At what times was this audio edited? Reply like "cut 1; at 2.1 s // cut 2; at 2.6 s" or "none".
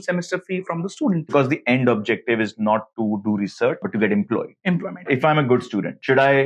cut 1; at 1.3 s // cut 2; at 3.9 s // cut 3; at 5.1 s